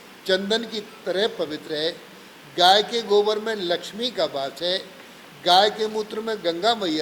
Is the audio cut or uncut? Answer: uncut